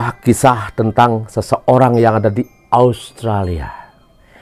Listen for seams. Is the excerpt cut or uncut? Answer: uncut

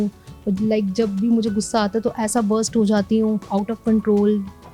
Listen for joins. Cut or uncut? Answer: cut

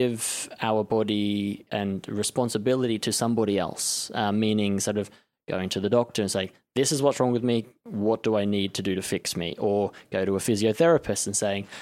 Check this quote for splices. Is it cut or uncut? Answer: cut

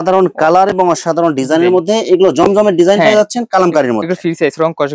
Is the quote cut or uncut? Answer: uncut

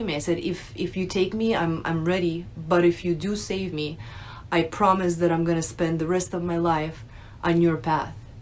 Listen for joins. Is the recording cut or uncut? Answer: uncut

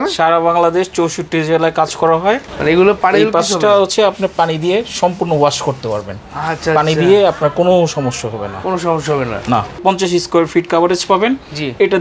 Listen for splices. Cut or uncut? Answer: cut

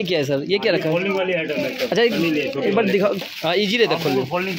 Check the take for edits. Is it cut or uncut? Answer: cut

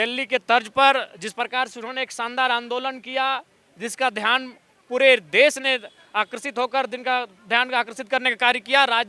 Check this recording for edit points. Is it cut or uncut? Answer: uncut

